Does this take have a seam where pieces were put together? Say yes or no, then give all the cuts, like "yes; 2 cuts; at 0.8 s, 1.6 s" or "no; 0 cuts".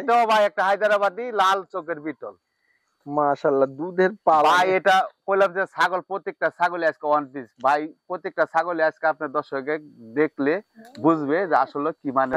no; 0 cuts